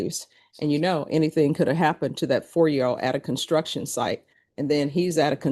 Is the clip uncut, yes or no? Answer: yes